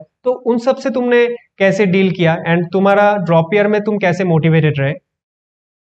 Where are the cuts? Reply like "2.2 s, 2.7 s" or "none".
none